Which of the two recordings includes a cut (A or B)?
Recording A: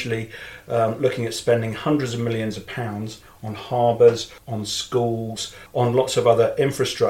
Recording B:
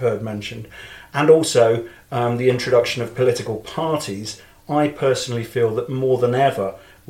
A